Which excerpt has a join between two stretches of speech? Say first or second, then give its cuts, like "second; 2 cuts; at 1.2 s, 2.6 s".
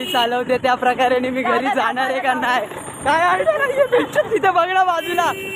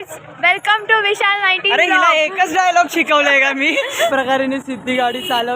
second; 1 cut; at 4.1 s